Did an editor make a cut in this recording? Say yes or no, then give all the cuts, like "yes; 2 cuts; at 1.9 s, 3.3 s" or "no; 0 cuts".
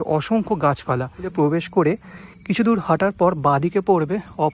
yes; 1 cut; at 1.3 s